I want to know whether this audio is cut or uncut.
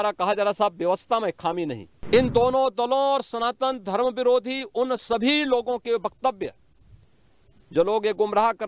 cut